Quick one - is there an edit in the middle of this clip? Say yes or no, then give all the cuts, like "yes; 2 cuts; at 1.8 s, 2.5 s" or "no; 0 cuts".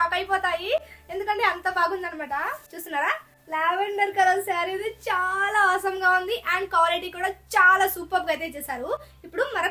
no; 0 cuts